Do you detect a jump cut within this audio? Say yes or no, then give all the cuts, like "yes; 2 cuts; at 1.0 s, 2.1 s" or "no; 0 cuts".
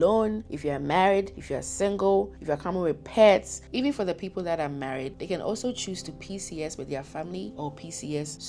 yes; 2 cuts; at 2.4 s, 3.6 s